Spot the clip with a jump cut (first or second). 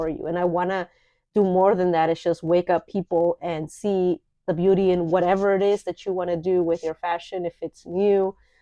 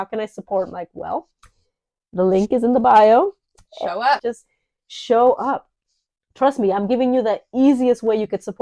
second